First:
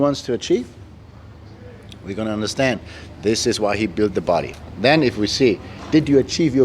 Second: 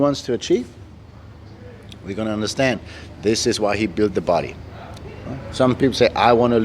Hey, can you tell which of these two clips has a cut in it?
second; 1 cut; at 4.6 s

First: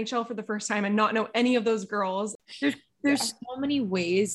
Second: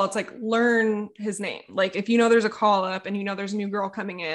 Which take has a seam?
first; 1 cut; at 2.4 s

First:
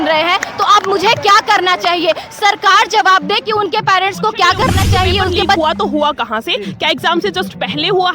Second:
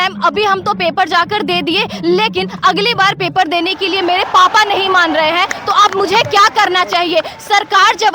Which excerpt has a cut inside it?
first; 1 cut; at 5.6 s

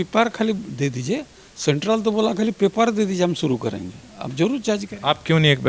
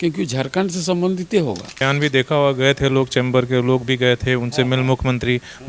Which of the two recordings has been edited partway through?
second; 1 cut; at 1.8 s

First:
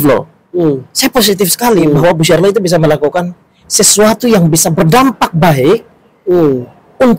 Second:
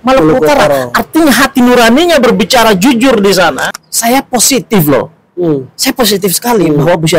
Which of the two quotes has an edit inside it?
second; 1 cut; at 3.6 s

